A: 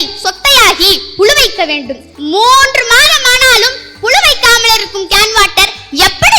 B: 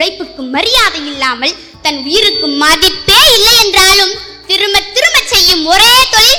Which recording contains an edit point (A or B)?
A